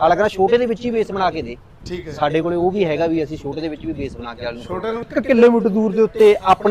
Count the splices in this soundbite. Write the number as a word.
one